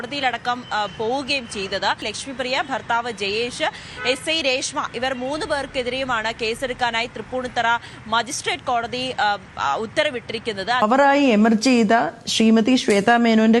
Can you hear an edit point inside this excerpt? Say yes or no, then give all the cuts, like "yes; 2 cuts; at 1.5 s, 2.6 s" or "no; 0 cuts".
yes; 2 cuts; at 2.1 s, 10.8 s